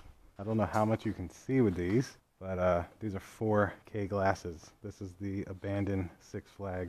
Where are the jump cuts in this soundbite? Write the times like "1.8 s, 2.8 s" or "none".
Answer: none